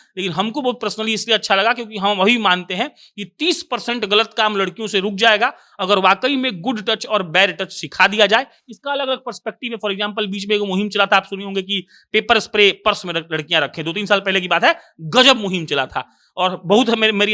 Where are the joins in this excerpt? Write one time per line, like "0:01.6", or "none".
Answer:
none